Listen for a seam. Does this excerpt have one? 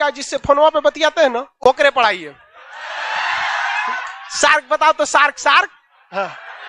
no; 0 cuts

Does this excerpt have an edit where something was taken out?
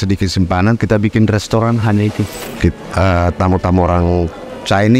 yes; 1 cut; at 2.4 s

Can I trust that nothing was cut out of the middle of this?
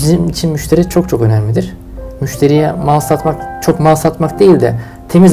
yes; 0 cuts

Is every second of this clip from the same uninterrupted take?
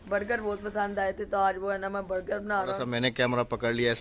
no; 1 cut; at 2.8 s

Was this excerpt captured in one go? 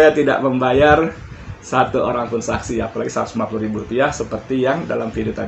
yes; 0 cuts

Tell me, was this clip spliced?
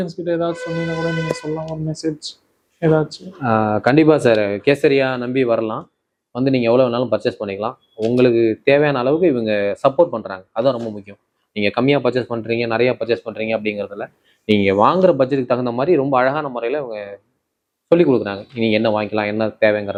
no; 0 cuts

